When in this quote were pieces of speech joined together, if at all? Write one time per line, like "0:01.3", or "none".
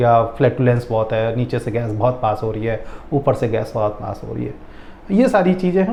none